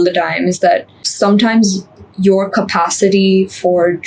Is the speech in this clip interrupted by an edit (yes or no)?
yes